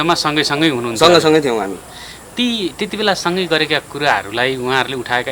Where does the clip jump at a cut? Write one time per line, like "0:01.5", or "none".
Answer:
none